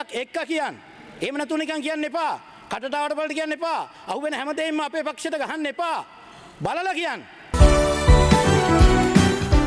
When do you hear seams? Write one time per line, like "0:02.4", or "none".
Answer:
0:07.5